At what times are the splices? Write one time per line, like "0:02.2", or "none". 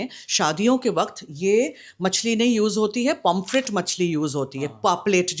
none